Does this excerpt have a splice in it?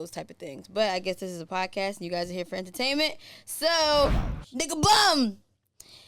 yes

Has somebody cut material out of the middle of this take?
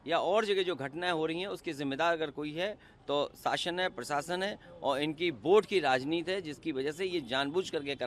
no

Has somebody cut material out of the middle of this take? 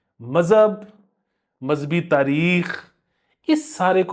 no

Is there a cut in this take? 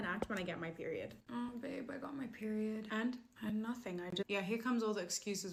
no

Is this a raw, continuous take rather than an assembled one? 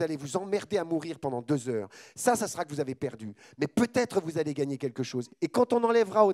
no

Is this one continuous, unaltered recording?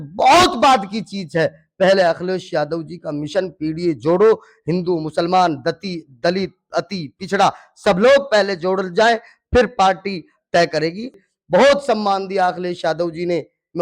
no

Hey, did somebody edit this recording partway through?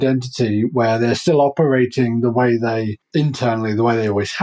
yes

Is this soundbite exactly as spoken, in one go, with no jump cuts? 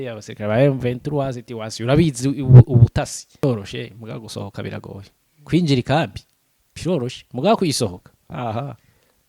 no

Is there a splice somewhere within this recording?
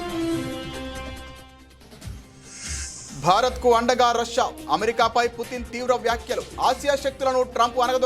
yes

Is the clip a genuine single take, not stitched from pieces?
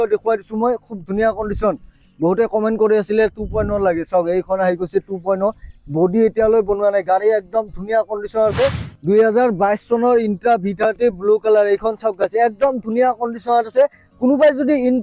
no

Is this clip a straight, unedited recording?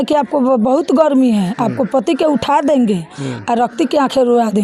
yes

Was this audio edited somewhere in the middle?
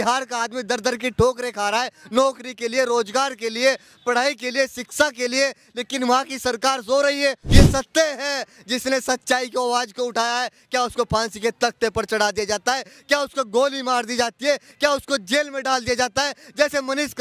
yes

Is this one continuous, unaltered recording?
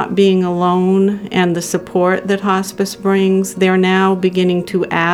yes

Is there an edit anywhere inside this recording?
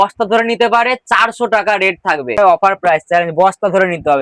yes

